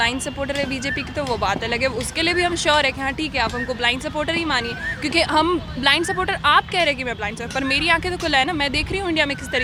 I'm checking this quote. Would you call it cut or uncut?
uncut